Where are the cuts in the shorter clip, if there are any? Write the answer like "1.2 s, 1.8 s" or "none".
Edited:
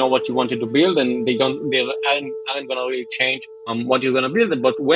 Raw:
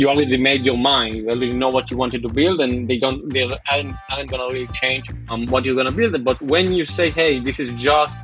none